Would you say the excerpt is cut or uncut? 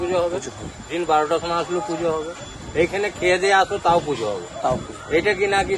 uncut